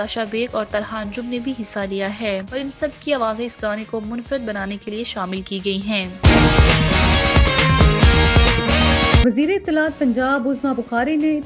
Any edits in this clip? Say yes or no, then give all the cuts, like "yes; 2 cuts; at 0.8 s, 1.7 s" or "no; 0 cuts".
yes; 2 cuts; at 6.2 s, 9.2 s